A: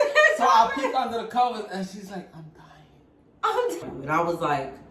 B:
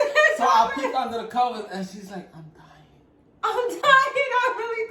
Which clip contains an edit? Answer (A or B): A